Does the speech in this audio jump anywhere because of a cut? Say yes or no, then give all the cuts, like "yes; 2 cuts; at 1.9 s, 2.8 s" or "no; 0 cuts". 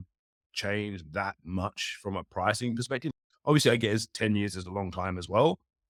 no; 0 cuts